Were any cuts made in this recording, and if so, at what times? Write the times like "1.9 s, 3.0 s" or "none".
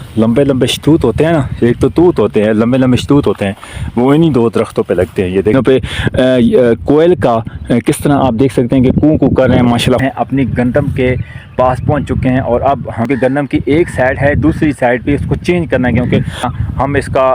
5.5 s, 10.0 s, 16.5 s